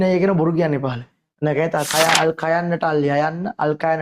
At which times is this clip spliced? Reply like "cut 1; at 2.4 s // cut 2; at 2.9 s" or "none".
cut 1; at 1.9 s